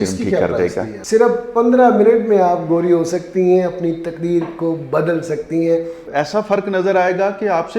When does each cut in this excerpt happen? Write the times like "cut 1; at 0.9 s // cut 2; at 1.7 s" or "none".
cut 1; at 1.0 s // cut 2; at 6.1 s